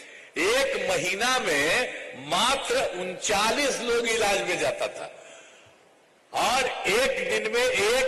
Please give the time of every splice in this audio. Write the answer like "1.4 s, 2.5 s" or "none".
none